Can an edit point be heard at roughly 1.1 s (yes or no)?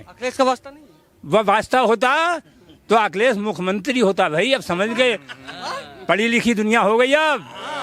no